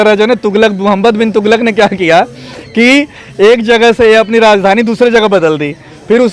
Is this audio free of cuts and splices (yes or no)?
yes